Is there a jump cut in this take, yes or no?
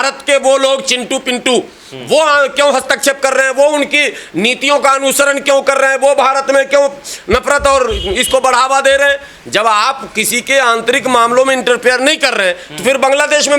no